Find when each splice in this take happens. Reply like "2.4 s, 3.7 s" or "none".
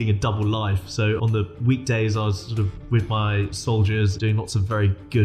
1.2 s, 4.1 s